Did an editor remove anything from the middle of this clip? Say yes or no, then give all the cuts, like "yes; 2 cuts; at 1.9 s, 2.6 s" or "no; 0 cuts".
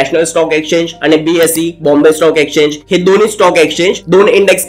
no; 0 cuts